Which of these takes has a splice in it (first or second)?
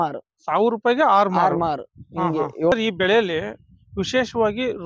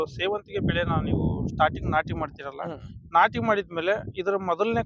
first